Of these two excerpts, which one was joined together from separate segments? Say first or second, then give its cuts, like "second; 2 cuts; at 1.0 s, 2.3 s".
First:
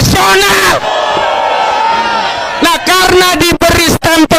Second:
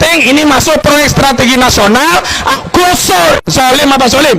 second; 1 cut; at 2.5 s